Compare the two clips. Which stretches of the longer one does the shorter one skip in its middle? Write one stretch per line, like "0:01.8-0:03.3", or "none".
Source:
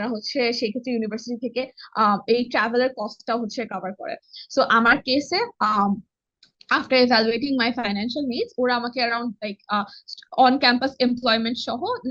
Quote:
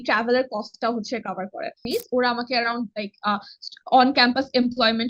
0:04.3-0:08.3